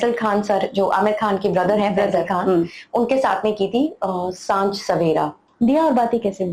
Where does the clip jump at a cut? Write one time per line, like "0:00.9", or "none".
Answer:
0:05.4